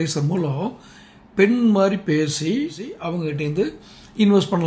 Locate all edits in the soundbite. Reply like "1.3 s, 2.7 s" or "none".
2.9 s